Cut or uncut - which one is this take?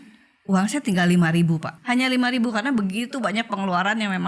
cut